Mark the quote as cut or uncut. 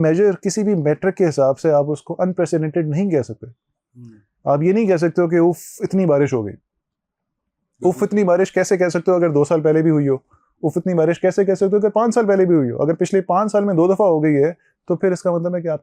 uncut